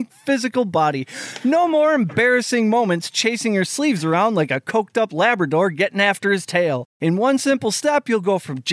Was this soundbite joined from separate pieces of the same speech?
yes; 1 cut; at 6.9 s

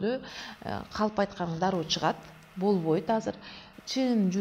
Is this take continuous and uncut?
yes; 0 cuts

